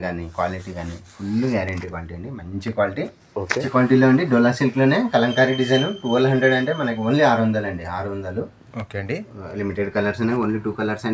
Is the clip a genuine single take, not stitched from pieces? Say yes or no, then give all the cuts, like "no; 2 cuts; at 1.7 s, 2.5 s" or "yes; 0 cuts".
no; 1 cut; at 3.6 s